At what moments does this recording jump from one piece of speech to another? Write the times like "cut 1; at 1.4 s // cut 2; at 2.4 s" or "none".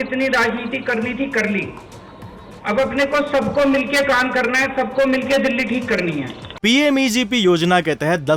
cut 1; at 6.4 s